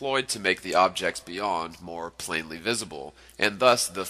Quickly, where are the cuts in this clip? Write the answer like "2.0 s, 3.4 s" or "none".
none